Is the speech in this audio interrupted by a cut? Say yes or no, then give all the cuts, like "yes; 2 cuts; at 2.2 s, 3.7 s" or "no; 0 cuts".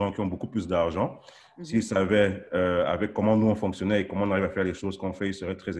no; 0 cuts